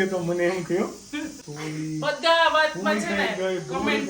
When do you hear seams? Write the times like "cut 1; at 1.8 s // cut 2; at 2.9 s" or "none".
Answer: cut 1; at 1.4 s